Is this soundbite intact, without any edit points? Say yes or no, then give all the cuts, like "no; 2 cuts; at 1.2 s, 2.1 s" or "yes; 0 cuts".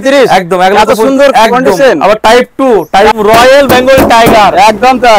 no; 1 cut; at 3.1 s